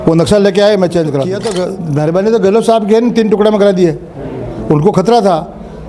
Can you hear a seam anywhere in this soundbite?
yes; 1 cut; at 1.3 s

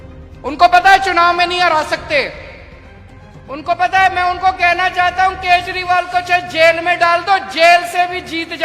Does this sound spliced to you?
no; 0 cuts

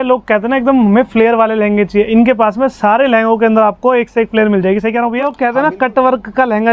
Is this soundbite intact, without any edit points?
no; 1 cut; at 5.1 s

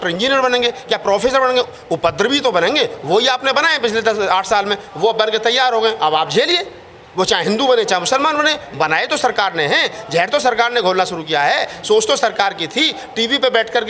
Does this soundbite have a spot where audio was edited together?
no; 0 cuts

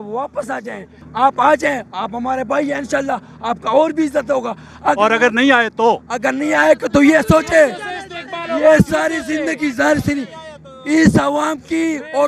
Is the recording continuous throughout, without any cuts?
yes; 0 cuts

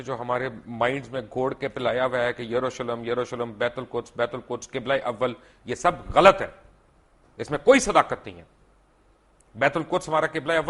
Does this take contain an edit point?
no; 0 cuts

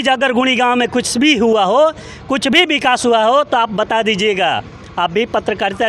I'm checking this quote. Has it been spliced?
no; 0 cuts

